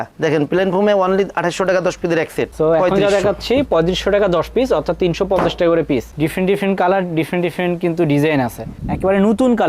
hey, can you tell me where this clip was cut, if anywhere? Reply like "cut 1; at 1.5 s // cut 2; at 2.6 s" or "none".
cut 1; at 2.5 s // cut 2; at 6.1 s